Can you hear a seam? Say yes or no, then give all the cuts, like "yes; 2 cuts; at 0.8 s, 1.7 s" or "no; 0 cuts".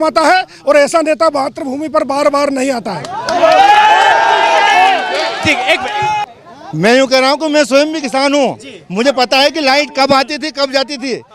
yes; 1 cut; at 6.2 s